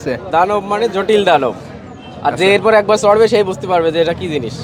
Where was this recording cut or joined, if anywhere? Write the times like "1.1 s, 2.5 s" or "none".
none